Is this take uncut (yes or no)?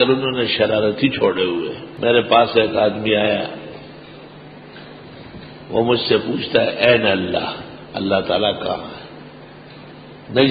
no